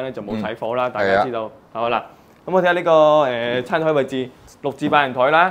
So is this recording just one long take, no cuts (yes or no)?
yes